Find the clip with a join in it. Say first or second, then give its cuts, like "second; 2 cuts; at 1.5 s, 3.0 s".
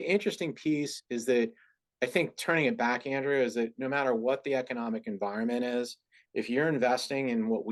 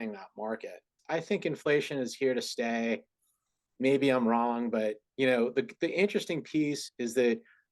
second; 1 cut; at 1.0 s